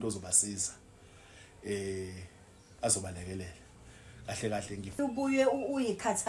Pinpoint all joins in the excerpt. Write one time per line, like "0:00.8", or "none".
0:05.0